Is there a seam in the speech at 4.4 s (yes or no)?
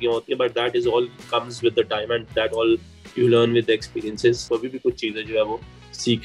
yes